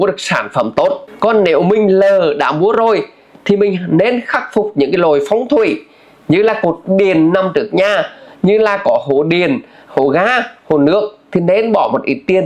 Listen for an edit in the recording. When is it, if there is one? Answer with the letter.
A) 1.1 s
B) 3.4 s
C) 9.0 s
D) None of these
A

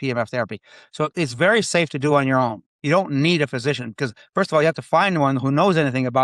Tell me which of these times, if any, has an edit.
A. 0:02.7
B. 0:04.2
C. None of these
C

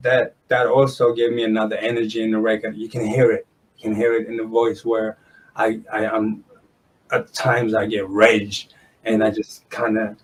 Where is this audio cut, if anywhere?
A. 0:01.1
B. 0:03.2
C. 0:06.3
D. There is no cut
D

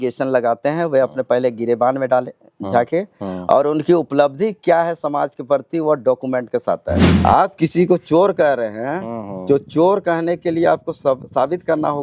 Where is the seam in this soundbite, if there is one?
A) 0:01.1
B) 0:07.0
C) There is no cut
B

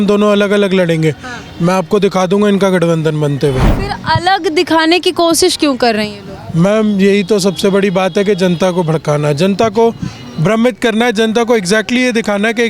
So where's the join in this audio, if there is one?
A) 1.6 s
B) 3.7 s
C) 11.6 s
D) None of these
B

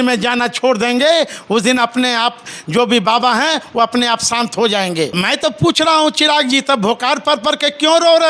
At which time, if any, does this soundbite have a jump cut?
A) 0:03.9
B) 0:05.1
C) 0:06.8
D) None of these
B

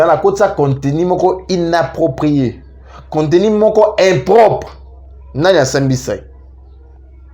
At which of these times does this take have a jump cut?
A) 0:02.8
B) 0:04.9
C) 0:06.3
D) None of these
D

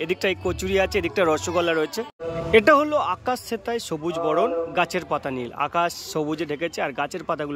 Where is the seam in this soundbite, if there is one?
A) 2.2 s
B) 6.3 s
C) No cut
A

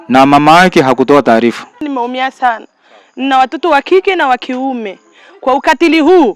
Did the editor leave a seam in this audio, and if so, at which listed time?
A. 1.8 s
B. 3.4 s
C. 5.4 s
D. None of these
A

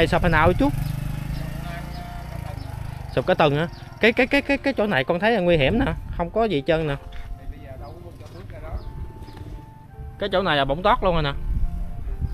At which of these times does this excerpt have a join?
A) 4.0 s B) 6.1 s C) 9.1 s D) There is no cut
D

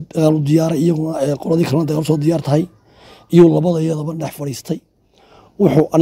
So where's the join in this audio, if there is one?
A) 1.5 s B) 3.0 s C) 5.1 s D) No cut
D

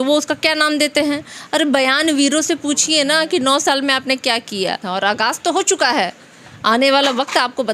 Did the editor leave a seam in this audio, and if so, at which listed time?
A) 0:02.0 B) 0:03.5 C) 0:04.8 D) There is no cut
C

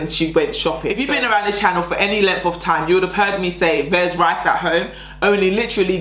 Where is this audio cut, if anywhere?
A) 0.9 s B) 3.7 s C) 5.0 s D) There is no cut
A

